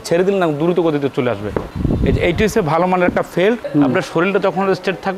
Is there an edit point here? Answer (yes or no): yes